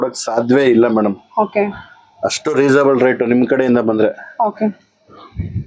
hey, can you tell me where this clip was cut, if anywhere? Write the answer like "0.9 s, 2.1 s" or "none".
none